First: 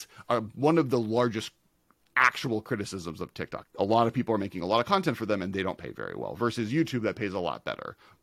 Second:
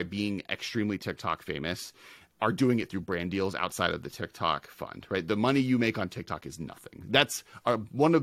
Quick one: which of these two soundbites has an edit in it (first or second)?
first